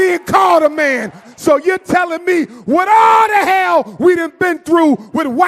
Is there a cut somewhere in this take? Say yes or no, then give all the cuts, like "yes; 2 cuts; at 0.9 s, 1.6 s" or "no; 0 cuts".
yes; 1 cut; at 1.2 s